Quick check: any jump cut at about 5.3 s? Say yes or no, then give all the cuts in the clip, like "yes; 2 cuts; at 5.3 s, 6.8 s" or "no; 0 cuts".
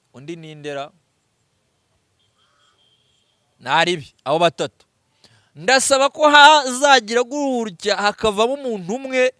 no; 0 cuts